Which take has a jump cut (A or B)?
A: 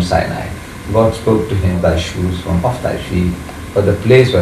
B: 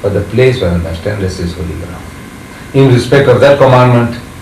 A